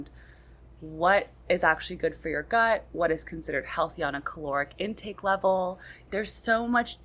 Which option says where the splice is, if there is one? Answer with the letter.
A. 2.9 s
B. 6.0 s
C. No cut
B